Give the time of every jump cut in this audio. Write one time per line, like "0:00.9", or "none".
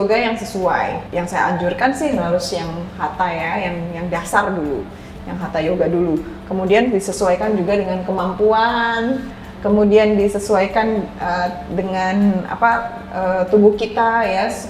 0:01.0